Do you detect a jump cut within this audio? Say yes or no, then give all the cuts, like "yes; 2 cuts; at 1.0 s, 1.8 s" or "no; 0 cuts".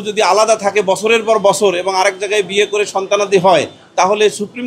no; 0 cuts